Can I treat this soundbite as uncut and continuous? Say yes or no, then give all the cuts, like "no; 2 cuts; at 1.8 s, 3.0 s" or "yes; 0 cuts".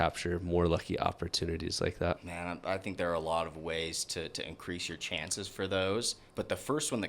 no; 2 cuts; at 2.3 s, 6.2 s